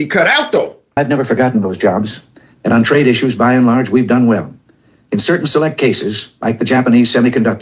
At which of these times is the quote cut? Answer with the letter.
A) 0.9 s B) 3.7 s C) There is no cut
A